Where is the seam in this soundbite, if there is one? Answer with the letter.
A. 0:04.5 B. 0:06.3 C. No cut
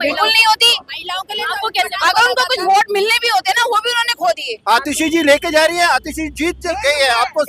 A